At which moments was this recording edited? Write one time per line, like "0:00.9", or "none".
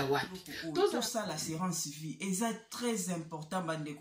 0:00.9